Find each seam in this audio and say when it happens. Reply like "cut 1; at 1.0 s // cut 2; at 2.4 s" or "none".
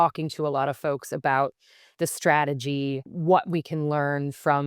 cut 1; at 3.1 s